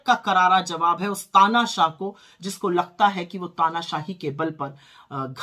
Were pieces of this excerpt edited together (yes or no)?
no